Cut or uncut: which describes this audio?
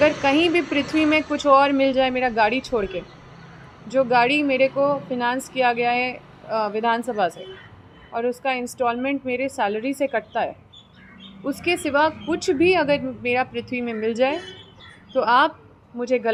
uncut